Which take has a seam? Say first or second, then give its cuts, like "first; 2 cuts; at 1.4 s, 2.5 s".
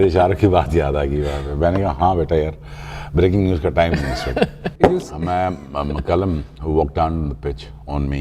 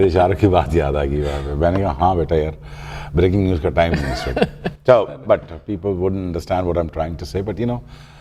first; 1 cut; at 4.7 s